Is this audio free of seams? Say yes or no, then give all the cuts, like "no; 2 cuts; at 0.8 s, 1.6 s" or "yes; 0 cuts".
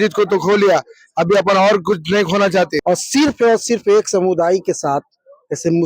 no; 1 cut; at 2.8 s